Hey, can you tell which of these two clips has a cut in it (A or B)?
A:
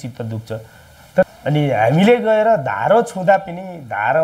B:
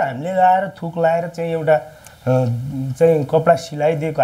A